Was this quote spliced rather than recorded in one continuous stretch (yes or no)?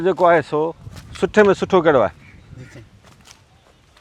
no